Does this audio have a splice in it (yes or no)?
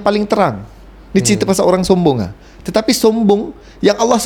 no